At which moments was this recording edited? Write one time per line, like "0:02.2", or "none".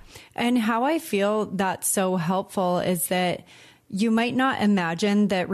none